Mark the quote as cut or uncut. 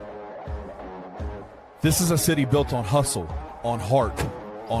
cut